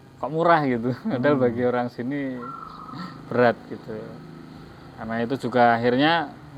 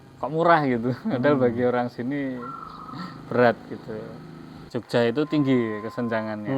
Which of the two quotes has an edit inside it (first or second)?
second